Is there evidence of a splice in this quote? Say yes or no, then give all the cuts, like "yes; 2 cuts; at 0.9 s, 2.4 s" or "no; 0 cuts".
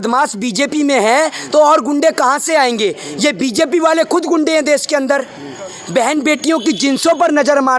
no; 0 cuts